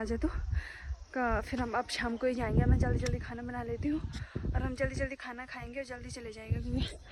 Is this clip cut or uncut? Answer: uncut